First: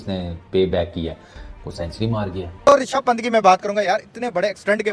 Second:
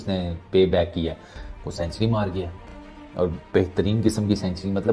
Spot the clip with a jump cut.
first; 1 cut; at 2.5 s

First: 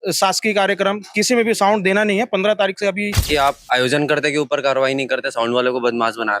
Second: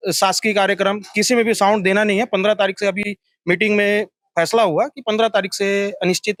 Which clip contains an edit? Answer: first; 1 cut; at 3.2 s

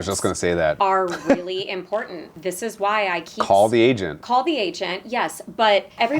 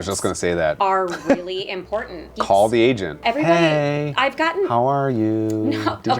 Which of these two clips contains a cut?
second; 2 cuts; at 2.3 s, 3.2 s

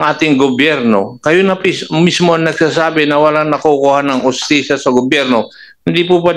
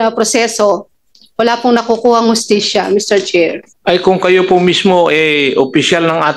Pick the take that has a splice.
second; 1 cut; at 3.7 s

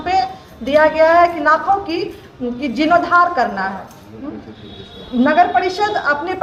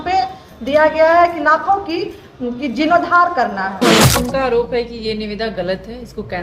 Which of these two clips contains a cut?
second; 1 cut; at 3.9 s

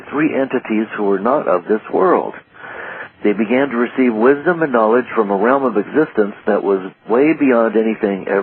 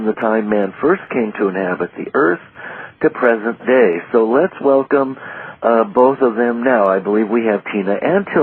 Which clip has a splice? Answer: second; 1 cut; at 2.4 s

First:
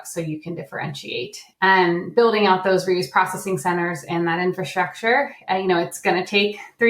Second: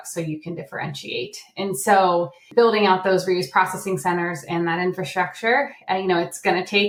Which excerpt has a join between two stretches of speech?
first; 1 cut; at 1.8 s

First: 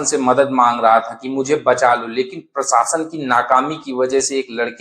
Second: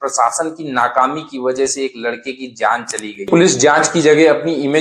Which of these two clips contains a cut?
second; 1 cut; at 3.3 s

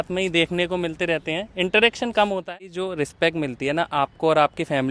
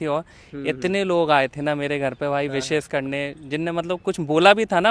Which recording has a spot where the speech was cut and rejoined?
first; 1 cut; at 2.8 s

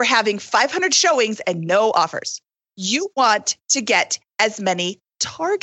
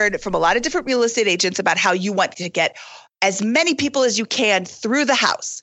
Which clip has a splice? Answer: first; 1 cut; at 2.4 s

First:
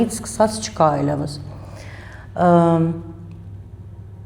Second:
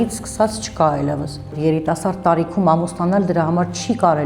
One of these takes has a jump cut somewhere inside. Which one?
second; 1 cut; at 1.6 s

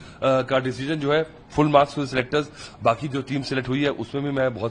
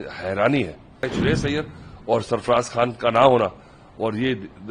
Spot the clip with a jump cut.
second; 1 cut; at 1.0 s

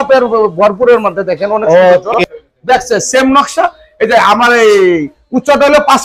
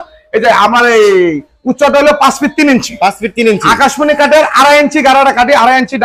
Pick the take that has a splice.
first; 1 cut; at 2.2 s

